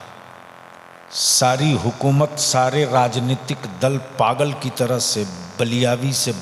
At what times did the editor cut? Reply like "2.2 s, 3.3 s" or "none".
1.0 s